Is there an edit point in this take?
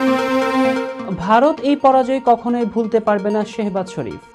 yes; 1 cut; at 0.9 s

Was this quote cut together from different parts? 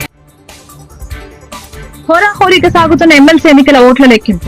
yes; 1 cut; at 2.0 s

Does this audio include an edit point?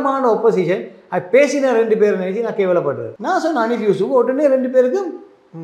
yes; 1 cut; at 3.1 s

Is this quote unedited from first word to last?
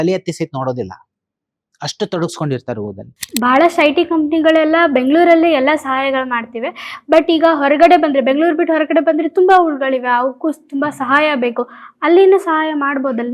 no; 1 cut; at 3.2 s

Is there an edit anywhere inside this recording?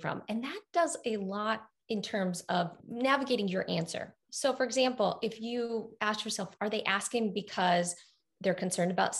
yes; 1 cut; at 2.8 s

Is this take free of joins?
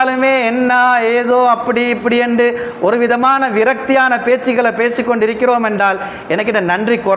yes; 0 cuts

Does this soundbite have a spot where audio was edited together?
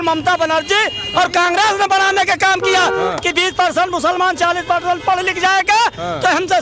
no; 0 cuts

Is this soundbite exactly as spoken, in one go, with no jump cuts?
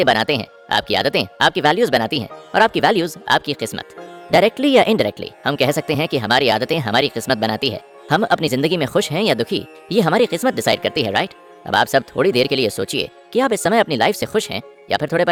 yes; 0 cuts

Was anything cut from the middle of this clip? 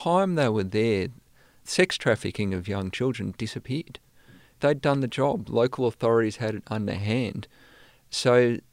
yes; 2 cuts; at 1.6 s, 4.6 s

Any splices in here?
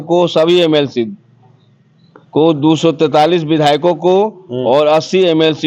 no; 0 cuts

